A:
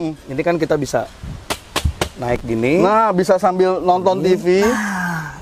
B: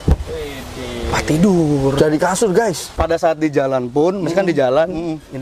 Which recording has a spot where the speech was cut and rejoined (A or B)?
B